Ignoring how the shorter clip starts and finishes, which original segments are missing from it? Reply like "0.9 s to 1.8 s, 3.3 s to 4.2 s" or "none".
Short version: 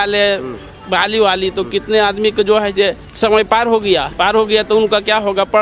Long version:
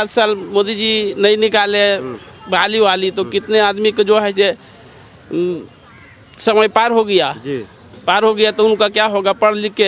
4.7 s to 6.3 s, 7.3 s to 8.0 s